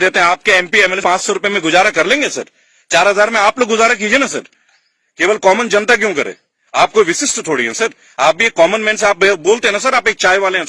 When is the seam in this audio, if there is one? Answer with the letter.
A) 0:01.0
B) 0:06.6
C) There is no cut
A